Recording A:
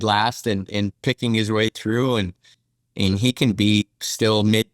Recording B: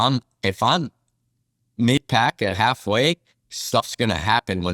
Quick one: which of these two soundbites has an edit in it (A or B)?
A